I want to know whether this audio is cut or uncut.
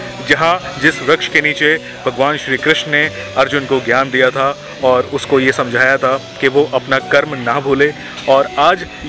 uncut